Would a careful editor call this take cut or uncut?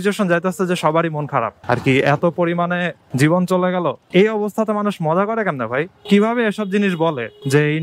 uncut